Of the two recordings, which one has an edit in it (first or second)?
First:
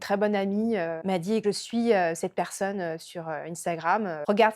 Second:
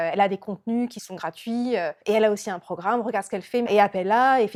first